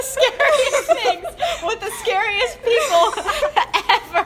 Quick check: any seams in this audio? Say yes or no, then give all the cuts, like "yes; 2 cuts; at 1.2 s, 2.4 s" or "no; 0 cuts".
no; 0 cuts